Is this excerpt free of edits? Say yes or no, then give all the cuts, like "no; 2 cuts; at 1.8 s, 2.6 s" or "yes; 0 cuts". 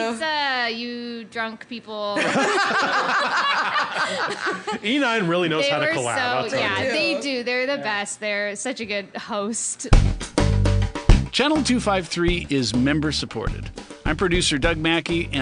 no; 1 cut; at 9.8 s